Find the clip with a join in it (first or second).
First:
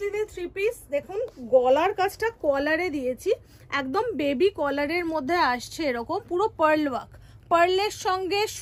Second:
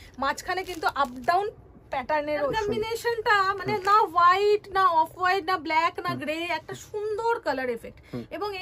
second